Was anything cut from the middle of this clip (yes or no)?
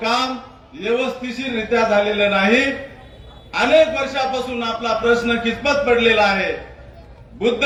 no